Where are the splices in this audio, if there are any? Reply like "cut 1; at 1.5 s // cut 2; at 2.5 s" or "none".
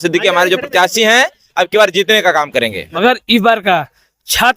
cut 1; at 2.8 s